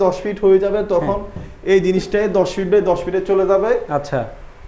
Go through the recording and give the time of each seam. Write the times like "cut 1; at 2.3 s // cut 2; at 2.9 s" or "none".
none